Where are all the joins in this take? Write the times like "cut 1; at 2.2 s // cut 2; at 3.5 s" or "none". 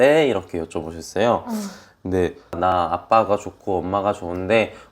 cut 1; at 2.6 s